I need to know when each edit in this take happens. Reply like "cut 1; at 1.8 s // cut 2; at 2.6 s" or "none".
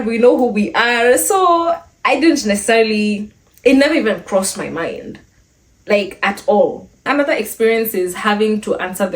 cut 1; at 6.9 s